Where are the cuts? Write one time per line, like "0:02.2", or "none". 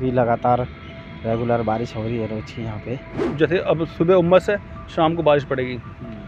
0:03.2